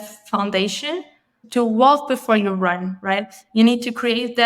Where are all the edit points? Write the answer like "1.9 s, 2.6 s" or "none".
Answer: 1.4 s